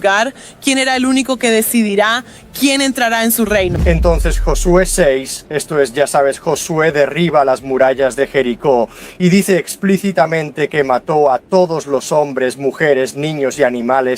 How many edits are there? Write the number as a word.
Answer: one